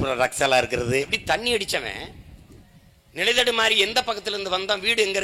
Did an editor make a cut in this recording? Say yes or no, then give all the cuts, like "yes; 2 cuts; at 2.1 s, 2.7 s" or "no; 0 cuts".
yes; 1 cut; at 1.1 s